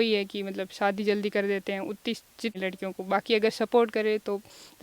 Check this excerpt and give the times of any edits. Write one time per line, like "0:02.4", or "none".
0:02.5